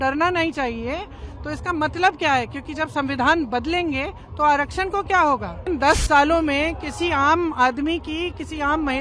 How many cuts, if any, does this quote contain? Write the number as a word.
one